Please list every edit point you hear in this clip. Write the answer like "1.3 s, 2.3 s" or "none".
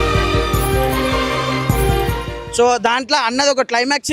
2.4 s